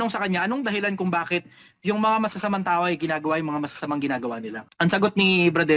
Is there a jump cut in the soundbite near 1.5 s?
no; 1 cut; at 4.6 s

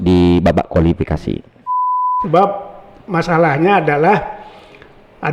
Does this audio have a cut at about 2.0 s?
yes; 1 cut; at 2.0 s

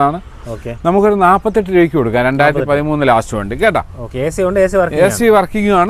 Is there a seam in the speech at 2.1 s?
no; 0 cuts

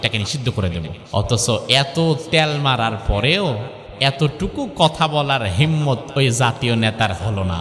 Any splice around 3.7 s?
no; 1 cut; at 1.0 s

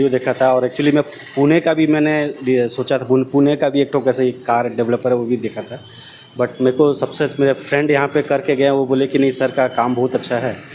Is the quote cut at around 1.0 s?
no; 0 cuts

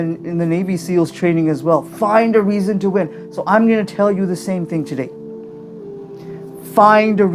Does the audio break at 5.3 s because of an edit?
yes; 2 cuts; at 5.3 s, 6.6 s

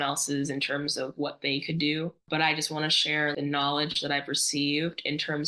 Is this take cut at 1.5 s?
no; 1 cut; at 3.3 s

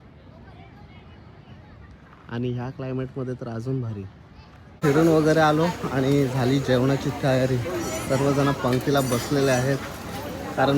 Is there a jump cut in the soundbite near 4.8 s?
yes; 1 cut; at 4.8 s

